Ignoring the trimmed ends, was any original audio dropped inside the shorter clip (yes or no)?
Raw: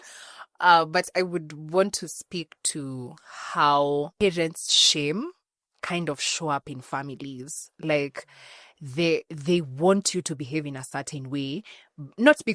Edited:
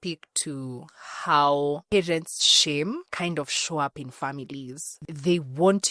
yes